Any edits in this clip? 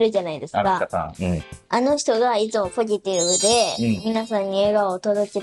no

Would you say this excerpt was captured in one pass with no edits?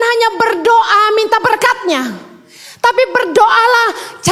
yes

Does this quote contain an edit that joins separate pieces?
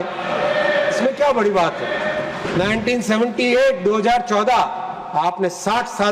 yes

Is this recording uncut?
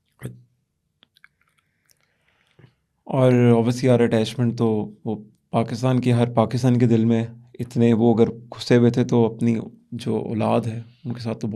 yes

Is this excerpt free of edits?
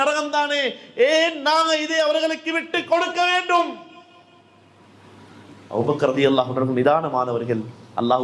yes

